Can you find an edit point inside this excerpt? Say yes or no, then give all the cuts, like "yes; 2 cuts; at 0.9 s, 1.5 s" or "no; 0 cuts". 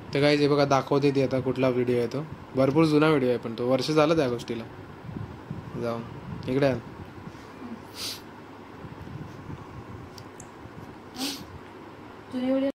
no; 0 cuts